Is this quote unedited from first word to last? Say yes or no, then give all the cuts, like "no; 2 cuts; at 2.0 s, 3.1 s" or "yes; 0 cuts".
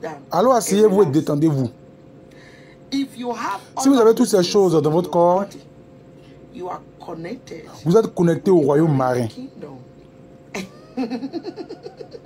no; 1 cut; at 9.3 s